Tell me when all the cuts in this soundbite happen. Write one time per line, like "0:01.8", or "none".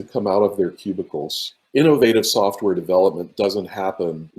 0:01.6